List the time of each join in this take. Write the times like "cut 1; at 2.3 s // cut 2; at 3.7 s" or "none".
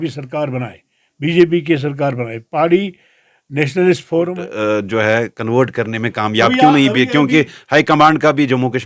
cut 1; at 4.4 s

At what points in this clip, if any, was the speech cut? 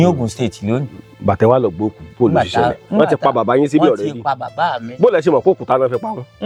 none

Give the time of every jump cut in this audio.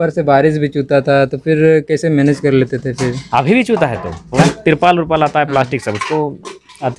cut 1; at 4.4 s

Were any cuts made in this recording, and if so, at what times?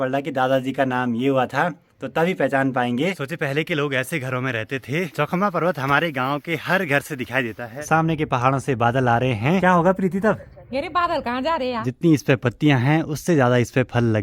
cut 1; at 3.2 s // cut 2; at 5.1 s // cut 3; at 7.8 s // cut 4; at 11.9 s

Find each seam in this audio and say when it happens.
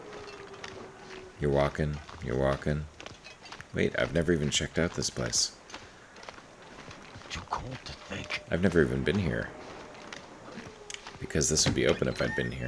none

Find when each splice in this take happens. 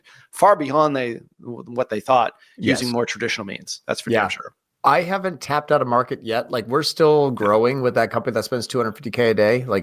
none

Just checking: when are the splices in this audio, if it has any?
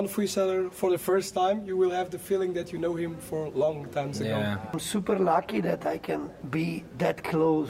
cut 1; at 4.8 s // cut 2; at 6.3 s

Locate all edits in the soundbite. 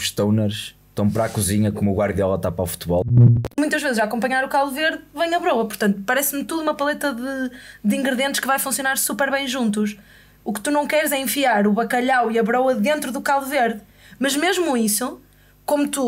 cut 1; at 3.1 s

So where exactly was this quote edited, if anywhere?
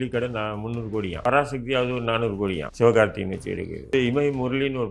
cut 1; at 1.2 s // cut 2; at 2.6 s // cut 3; at 3.9 s

